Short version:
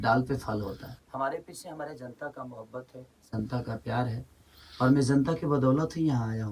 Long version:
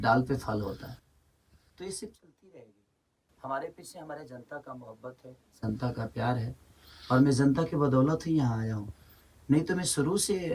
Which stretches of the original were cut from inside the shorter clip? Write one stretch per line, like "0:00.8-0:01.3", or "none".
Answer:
0:00.9-0:03.2